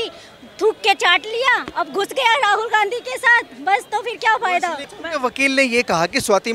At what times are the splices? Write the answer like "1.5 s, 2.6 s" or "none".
4.9 s